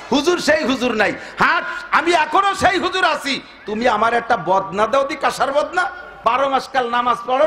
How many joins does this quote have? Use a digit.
1